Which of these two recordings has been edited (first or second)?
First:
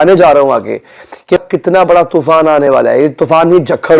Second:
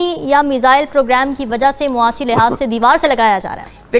first